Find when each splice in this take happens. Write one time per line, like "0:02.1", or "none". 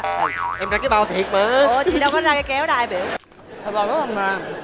0:03.2